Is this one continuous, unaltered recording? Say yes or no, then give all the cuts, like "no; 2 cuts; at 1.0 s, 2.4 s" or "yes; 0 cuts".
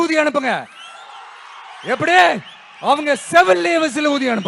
yes; 0 cuts